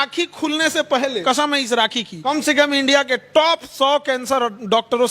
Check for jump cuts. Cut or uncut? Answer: cut